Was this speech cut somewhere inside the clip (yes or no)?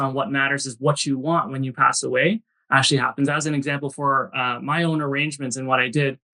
no